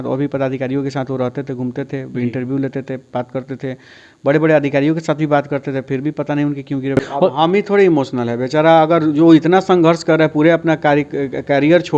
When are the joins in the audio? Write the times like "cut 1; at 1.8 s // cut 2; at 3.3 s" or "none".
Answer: cut 1; at 7.0 s